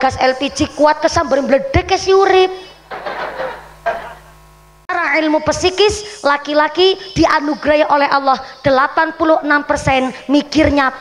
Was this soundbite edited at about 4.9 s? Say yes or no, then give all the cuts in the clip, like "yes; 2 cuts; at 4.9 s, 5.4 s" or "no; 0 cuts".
yes; 1 cut; at 4.9 s